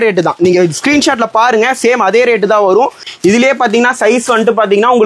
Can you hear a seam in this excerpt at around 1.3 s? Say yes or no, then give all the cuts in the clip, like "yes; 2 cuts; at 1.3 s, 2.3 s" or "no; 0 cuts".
no; 1 cut; at 3.0 s